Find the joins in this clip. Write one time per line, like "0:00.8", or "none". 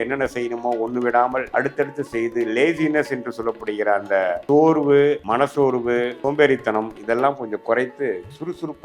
0:01.5
0:04.4
0:05.7